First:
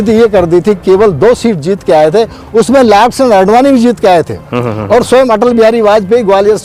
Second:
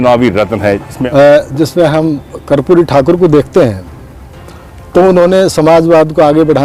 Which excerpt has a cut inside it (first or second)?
second